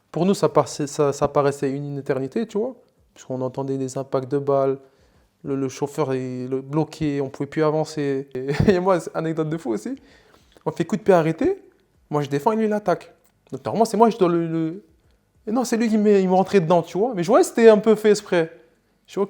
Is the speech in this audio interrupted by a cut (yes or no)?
yes